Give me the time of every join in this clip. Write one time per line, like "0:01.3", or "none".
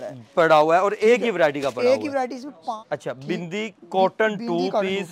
0:02.8

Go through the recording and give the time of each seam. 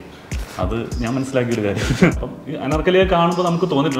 0:02.1

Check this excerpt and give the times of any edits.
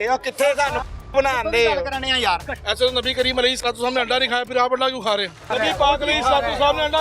0:02.6
0:05.5

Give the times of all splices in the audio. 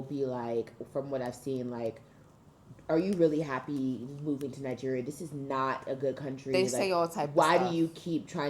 none

